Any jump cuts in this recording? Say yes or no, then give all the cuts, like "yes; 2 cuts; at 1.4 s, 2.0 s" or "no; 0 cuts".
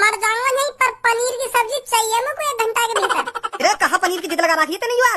no; 0 cuts